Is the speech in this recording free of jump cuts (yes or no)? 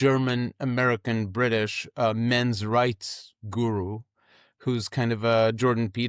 yes